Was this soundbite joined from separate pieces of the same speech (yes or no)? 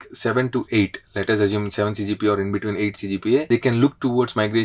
no